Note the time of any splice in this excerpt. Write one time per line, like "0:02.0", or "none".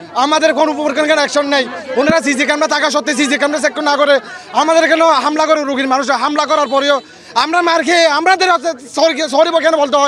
none